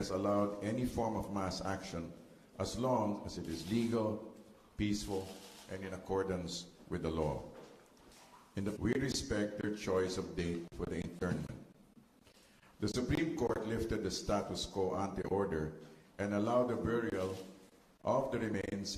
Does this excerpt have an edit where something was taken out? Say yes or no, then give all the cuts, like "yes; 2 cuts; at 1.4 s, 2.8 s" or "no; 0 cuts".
no; 0 cuts